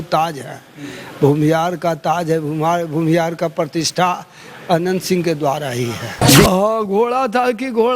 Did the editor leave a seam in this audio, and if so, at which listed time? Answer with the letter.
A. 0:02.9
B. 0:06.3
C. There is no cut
B